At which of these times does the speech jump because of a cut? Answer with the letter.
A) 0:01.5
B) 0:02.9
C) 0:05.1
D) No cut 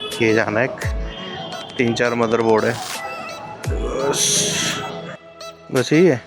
C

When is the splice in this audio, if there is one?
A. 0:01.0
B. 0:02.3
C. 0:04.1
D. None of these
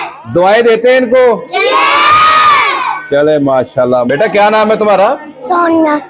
C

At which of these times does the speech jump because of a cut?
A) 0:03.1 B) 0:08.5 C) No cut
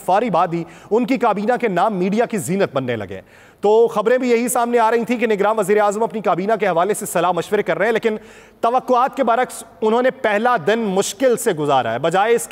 C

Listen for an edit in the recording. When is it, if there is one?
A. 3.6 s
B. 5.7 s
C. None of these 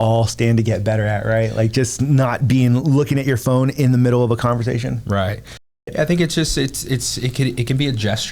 B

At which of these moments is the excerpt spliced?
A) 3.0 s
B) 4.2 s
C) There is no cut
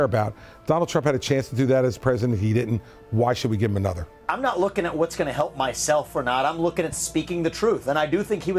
B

